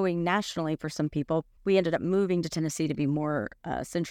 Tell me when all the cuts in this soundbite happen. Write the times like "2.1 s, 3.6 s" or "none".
1.5 s

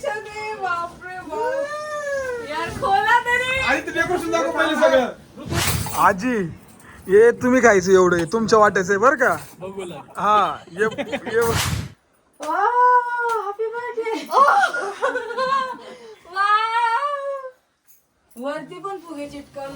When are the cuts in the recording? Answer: 5.5 s, 11.7 s

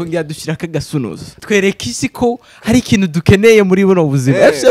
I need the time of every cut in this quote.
1.3 s

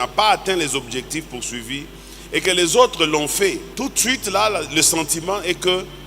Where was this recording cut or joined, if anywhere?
3.7 s

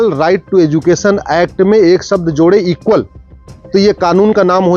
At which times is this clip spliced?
none

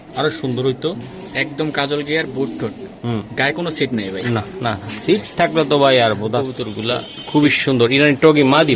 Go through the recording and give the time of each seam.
6.7 s

